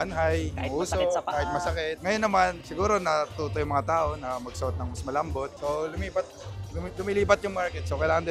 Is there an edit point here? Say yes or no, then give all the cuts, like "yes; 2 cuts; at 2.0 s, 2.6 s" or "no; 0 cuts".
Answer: no; 0 cuts